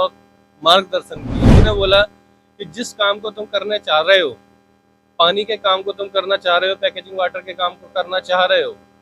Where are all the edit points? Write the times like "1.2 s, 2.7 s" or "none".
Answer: 1.5 s